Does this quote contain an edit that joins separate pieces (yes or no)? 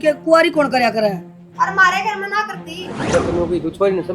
yes